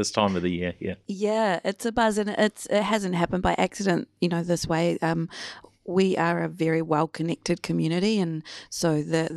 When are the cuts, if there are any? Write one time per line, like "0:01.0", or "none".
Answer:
none